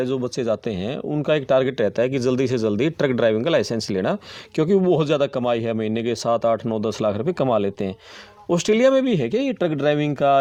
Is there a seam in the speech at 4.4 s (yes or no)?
no